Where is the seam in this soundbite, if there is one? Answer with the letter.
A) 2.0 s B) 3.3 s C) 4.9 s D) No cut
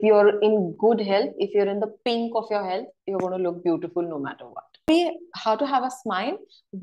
C